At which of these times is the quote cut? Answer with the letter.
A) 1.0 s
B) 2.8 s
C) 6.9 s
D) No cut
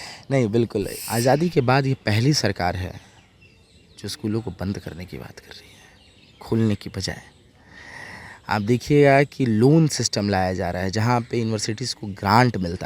A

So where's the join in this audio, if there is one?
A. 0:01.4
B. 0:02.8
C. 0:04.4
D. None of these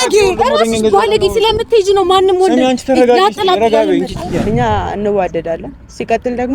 C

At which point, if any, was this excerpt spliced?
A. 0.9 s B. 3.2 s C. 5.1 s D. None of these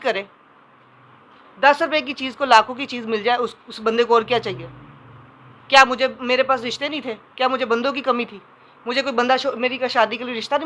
D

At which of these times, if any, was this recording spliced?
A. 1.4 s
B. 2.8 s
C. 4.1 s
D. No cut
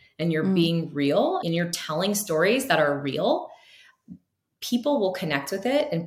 A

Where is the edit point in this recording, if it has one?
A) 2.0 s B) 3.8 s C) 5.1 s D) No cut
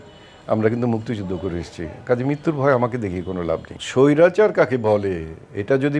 B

